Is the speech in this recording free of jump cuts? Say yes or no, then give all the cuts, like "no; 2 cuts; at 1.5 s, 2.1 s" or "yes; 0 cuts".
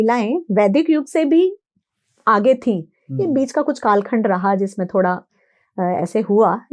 yes; 0 cuts